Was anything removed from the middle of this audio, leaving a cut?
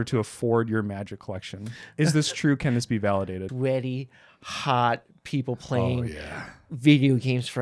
yes; 1 cut; at 3.4 s

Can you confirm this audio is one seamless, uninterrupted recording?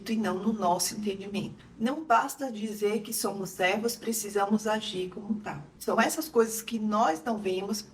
no; 2 cuts; at 1.5 s, 5.7 s

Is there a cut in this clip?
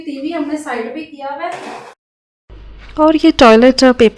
yes; 1 cut; at 1.9 s

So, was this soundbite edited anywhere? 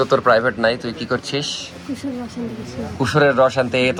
no; 0 cuts

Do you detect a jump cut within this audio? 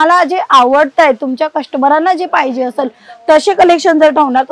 no; 0 cuts

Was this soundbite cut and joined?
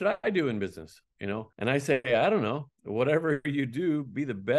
yes; 1 cut; at 1.5 s

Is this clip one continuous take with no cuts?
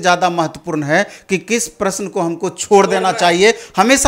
yes; 0 cuts

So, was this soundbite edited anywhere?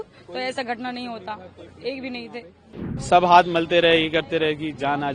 yes; 1 cut; at 2.9 s

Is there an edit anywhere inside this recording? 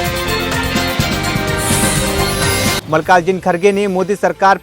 yes; 1 cut; at 2.8 s

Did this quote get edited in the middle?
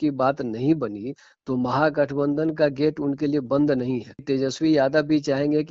yes; 1 cut; at 4.2 s

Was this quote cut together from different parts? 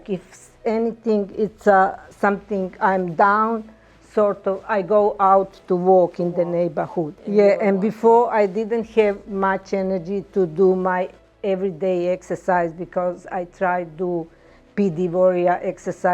yes; 1 cut; at 7.2 s

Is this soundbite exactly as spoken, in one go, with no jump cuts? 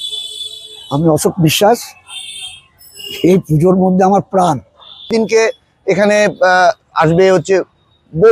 no; 1 cut; at 5.1 s

